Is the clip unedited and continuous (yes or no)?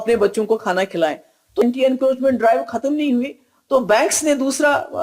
no